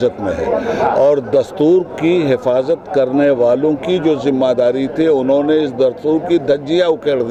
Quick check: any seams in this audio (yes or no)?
no